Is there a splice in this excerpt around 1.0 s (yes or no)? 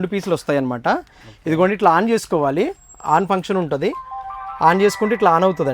no